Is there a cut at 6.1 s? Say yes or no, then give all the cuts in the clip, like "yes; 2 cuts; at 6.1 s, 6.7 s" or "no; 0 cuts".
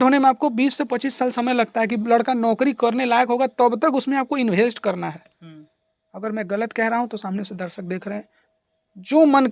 no; 0 cuts